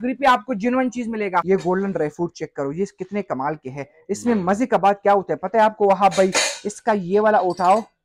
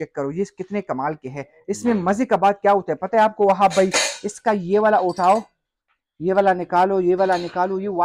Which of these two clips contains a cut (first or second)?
first